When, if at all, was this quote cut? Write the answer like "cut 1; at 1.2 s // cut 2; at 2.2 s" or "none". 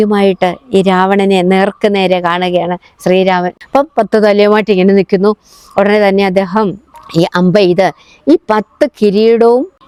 none